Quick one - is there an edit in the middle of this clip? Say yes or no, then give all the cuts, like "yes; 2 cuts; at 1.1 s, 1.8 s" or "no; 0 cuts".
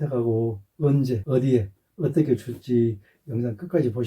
yes; 2 cuts; at 1.2 s, 3.1 s